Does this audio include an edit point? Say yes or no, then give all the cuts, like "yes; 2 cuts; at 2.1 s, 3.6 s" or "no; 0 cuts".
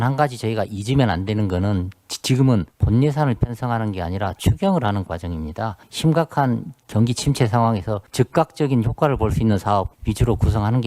yes; 4 cuts; at 2.8 s, 5.8 s, 8.0 s, 10.0 s